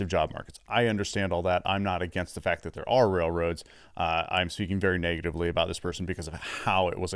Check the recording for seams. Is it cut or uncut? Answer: uncut